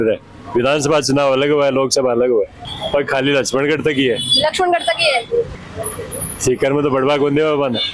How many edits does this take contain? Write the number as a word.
two